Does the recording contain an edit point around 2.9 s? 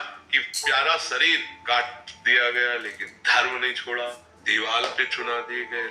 no; 2 cuts; at 1.5 s, 4.4 s

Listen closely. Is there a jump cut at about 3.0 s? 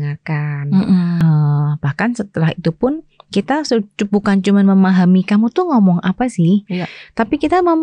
no; 1 cut; at 1.2 s

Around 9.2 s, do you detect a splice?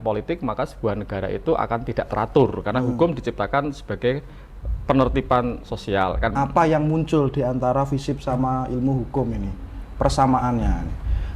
no; 1 cut; at 6.3 s

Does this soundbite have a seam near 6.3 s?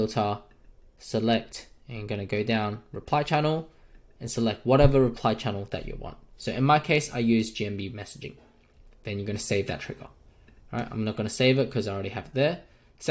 yes; 1 cut; at 6.3 s

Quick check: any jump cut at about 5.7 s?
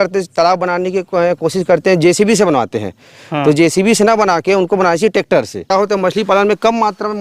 yes; 1 cut; at 5.7 s

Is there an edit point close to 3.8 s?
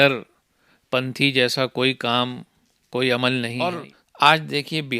yes; 1 cut; at 3.8 s

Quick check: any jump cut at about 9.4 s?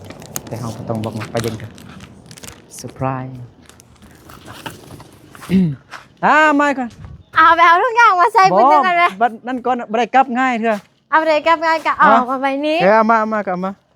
no; 1 cut; at 4.1 s

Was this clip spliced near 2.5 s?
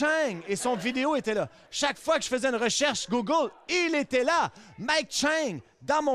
no; 0 cuts

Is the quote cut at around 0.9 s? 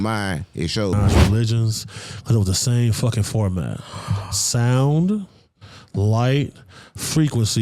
yes; 1 cut; at 0.9 s

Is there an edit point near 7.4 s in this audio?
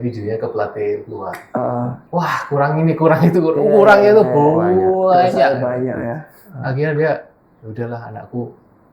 no; 1 cut; at 2.0 s

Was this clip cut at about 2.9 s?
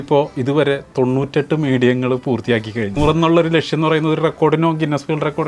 yes; 1 cut; at 2.9 s

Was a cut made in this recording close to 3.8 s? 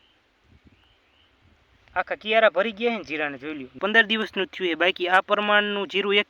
yes; 1 cut; at 3.8 s

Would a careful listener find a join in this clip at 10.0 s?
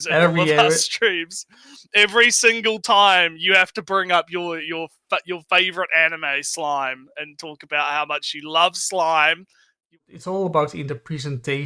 yes; 1 cut; at 10.0 s

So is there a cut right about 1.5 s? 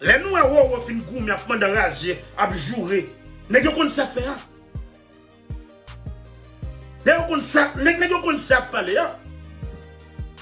no; 3 cuts; at 4.4 s, 7.0 s, 9.2 s

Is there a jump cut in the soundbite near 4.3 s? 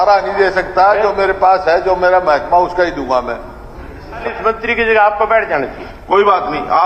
yes; 1 cut; at 4.3 s

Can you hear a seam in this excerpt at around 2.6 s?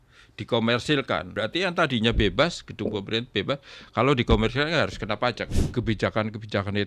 no; 2 cuts; at 1.3 s, 5.5 s

